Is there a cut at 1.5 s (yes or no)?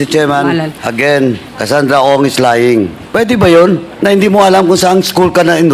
yes